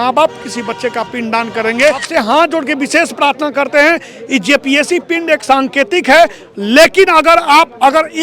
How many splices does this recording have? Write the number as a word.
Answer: one